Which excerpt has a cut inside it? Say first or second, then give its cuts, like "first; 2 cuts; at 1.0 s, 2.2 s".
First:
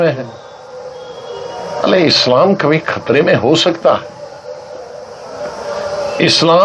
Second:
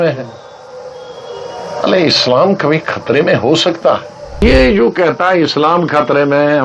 second; 1 cut; at 4.4 s